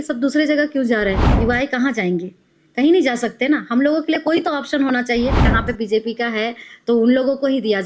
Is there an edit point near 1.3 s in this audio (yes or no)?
yes